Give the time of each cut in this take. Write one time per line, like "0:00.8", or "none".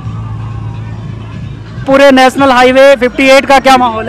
0:01.9